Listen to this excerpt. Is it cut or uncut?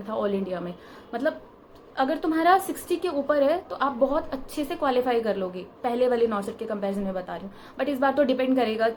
uncut